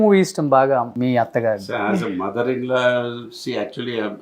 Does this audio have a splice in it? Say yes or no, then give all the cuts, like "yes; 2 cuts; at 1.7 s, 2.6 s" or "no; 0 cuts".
yes; 1 cut; at 0.9 s